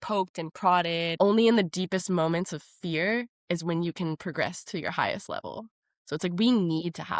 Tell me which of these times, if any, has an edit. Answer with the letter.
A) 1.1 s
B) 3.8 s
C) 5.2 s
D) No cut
A